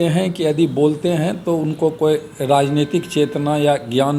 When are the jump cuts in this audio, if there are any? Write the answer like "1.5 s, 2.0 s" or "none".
none